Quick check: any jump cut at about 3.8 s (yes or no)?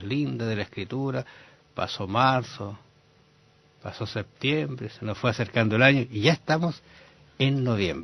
no